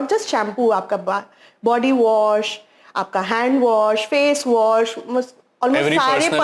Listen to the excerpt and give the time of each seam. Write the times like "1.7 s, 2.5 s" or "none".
none